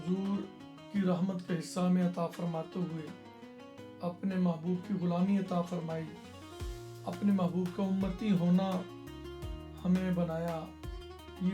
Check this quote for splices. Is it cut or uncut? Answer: uncut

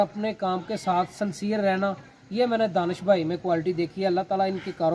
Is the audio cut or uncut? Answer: uncut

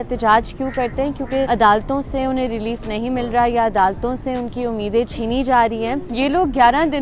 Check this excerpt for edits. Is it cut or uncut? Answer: cut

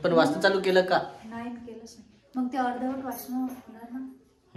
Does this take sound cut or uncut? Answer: uncut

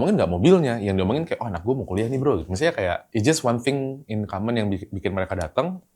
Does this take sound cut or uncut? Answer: cut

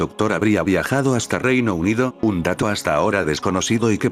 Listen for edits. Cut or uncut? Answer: uncut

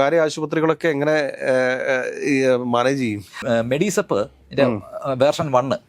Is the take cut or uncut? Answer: cut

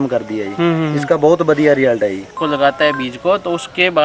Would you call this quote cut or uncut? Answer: cut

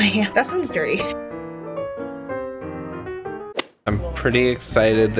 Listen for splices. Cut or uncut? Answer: uncut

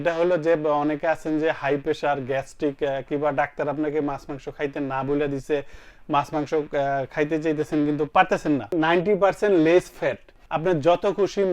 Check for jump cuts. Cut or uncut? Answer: cut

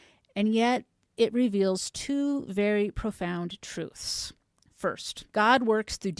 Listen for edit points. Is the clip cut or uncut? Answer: cut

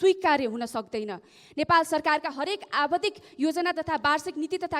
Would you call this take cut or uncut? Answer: uncut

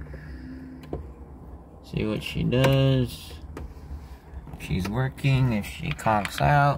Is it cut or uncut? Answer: uncut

